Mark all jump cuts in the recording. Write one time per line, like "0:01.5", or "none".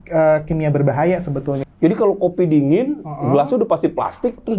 0:01.6